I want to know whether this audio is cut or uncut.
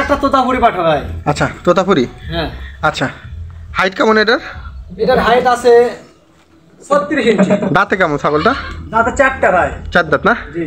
uncut